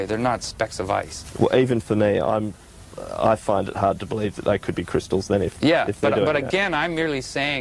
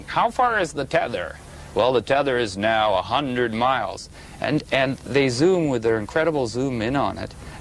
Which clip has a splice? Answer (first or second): second